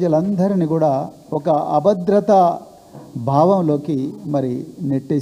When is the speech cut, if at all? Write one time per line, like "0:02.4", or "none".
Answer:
none

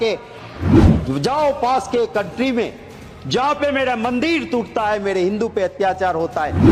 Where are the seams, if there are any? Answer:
none

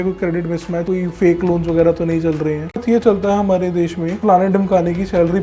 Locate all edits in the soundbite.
0:02.8

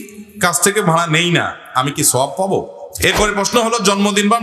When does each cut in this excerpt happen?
0:02.8

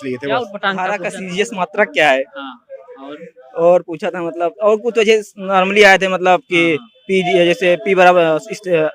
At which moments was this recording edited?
0:01.1

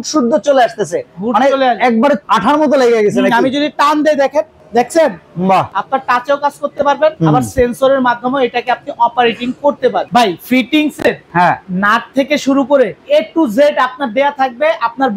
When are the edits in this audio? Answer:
0:02.2
0:04.6
0:05.8
0:07.2
0:10.1
0:11.2
0:13.0

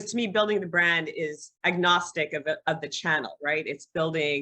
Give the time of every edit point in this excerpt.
0:01.5

